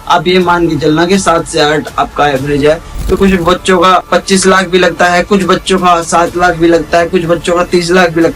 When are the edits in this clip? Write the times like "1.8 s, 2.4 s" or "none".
3.2 s, 4.0 s